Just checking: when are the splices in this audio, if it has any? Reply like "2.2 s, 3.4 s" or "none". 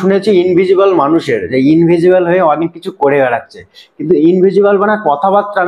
none